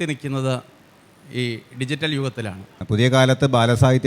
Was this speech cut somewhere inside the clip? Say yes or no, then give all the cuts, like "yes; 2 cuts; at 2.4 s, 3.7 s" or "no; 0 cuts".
yes; 1 cut; at 2.8 s